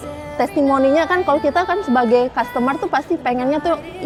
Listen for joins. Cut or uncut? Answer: uncut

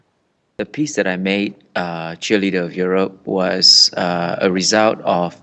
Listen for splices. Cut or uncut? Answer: cut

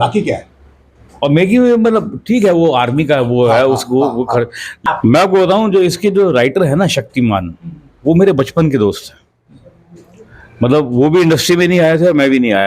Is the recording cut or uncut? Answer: cut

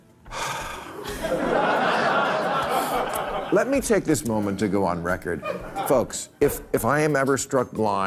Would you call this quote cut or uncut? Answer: uncut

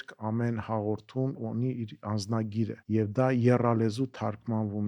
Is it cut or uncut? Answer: cut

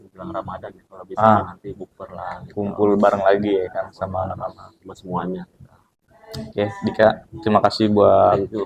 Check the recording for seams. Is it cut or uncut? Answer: uncut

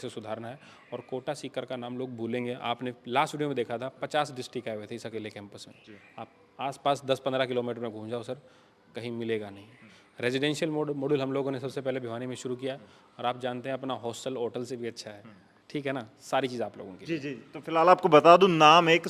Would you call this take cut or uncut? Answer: uncut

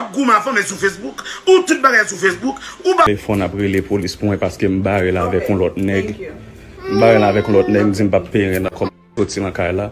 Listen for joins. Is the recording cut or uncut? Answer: cut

